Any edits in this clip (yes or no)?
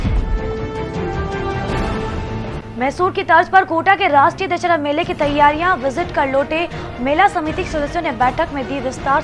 no